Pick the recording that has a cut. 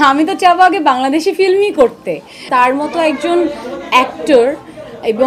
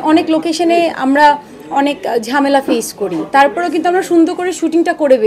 first; 1 cut; at 2.4 s

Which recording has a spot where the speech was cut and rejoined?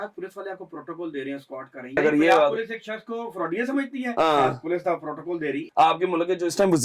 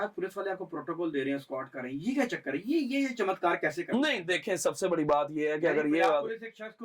first; 2 cuts; at 2.0 s, 5.6 s

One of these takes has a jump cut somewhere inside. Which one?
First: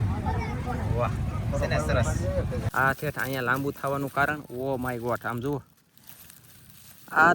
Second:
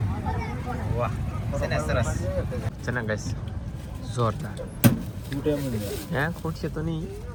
first; 1 cut; at 2.7 s

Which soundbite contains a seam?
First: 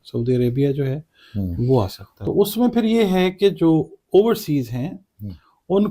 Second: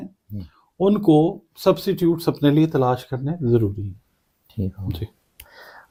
first; 1 cut; at 2.1 s

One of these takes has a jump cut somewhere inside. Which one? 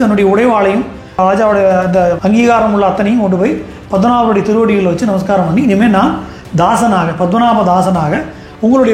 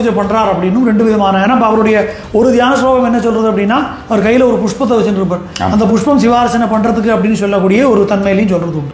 first; 2 cuts; at 1.2 s, 2.2 s

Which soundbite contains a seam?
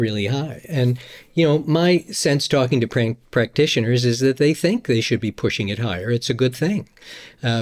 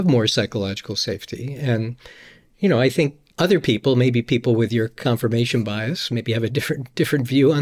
second; 1 cut; at 3.2 s

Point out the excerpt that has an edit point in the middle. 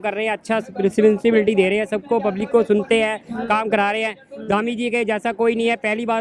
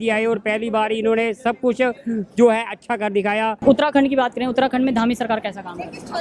second; 1 cut; at 3.6 s

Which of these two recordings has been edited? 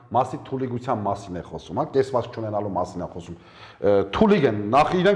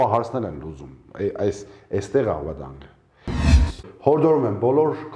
second; 1 cut; at 3.6 s

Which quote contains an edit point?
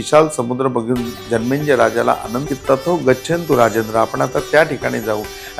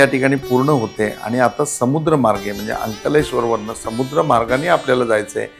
first; 1 cut; at 2.4 s

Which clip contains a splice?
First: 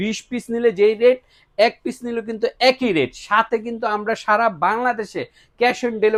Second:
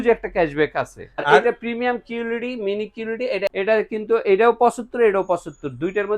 second; 2 cuts; at 1.2 s, 3.5 s

